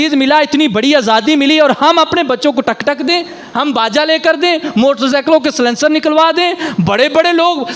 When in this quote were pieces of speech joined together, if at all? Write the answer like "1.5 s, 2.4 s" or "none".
none

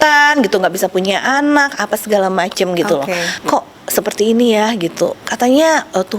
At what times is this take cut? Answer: 3.3 s, 5.2 s

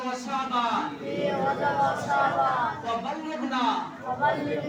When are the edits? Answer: none

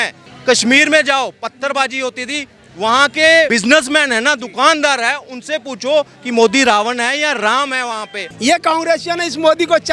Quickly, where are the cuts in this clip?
3.5 s, 8.2 s

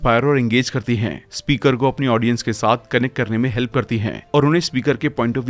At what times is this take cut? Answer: none

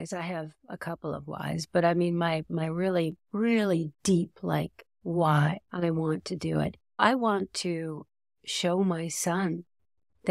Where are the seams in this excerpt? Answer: 5.7 s, 7.0 s

